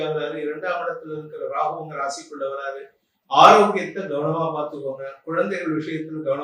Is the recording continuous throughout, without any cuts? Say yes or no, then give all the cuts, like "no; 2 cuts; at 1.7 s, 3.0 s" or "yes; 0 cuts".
yes; 0 cuts